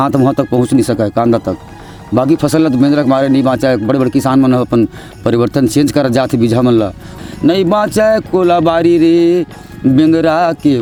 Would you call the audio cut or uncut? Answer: uncut